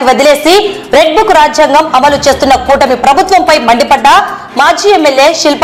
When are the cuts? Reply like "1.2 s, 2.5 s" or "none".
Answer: none